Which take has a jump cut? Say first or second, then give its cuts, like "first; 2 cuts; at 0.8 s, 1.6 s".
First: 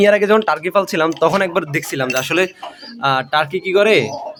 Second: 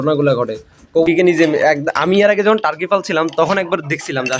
second; 1 cut; at 1.0 s